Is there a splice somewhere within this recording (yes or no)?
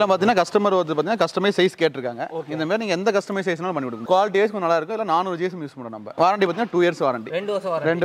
yes